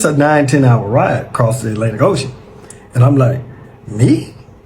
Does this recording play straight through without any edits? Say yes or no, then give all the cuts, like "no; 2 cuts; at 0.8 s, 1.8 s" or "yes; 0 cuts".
yes; 0 cuts